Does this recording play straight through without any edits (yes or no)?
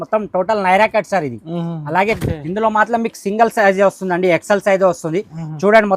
no